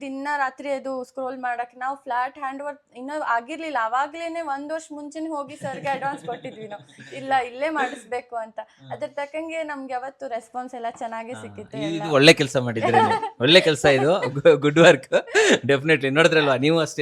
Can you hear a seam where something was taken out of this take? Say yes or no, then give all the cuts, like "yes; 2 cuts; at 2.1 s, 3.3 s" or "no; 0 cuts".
no; 0 cuts